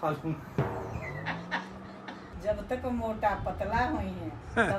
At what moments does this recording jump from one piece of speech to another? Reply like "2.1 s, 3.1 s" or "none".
none